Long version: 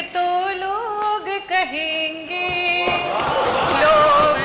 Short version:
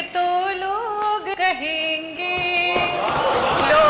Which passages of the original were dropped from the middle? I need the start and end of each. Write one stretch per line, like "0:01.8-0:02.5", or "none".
0:01.4-0:01.5